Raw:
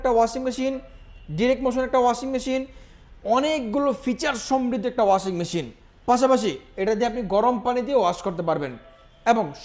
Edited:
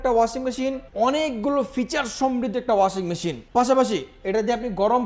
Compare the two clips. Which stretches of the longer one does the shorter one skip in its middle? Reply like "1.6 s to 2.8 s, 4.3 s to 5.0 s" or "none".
0.8 s to 3.1 s, 5.6 s to 5.9 s